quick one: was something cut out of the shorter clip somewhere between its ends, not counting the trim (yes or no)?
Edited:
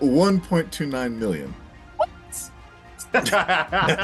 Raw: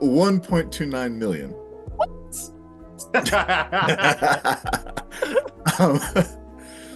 no